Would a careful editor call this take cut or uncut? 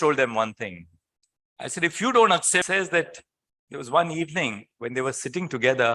cut